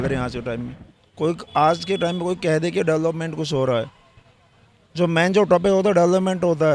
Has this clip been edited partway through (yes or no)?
no